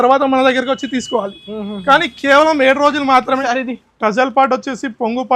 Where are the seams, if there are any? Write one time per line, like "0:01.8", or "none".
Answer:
0:03.4